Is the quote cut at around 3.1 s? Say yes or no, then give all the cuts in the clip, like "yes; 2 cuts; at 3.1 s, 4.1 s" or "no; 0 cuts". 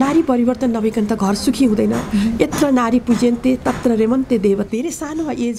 no; 1 cut; at 4.7 s